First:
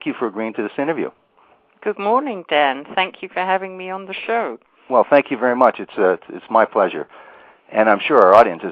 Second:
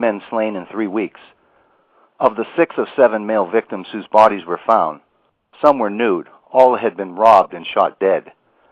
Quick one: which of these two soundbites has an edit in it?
first; 1 cut; at 4.9 s

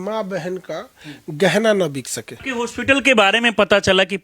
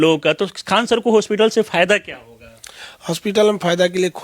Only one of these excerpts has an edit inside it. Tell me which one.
first; 1 cut; at 2.4 s

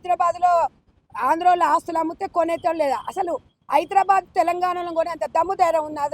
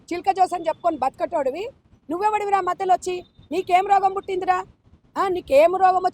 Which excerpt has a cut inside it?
second; 1 cut; at 1.9 s

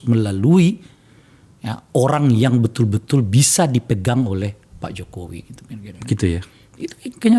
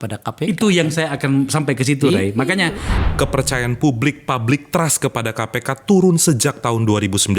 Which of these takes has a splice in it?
second; 1 cut; at 2.9 s

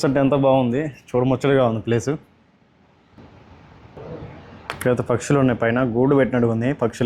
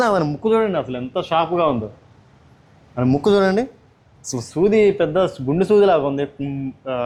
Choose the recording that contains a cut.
first; 1 cut; at 4.0 s

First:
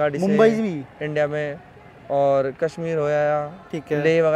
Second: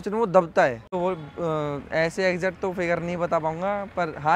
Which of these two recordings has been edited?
second; 1 cut; at 0.9 s

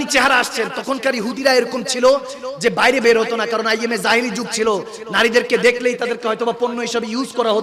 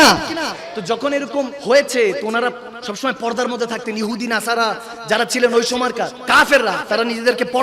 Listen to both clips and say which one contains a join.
second; 2 cuts; at 1.6 s, 6.2 s

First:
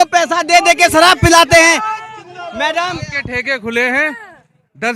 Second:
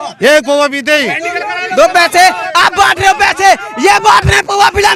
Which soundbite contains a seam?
first; 1 cut; at 3.1 s

